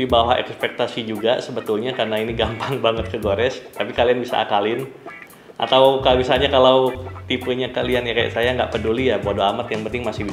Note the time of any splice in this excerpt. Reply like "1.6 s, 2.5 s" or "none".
none